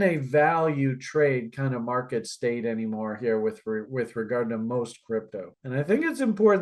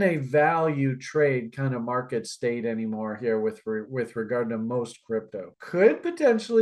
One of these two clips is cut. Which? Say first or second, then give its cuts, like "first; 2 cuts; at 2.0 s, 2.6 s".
second; 1 cut; at 5.6 s